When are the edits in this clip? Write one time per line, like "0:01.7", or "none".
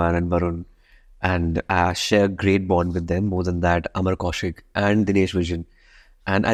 none